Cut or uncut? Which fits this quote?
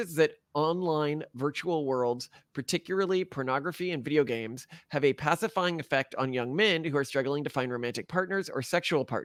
uncut